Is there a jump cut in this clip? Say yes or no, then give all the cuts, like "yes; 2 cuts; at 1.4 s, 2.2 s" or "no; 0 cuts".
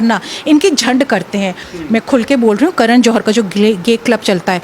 yes; 1 cut; at 1.6 s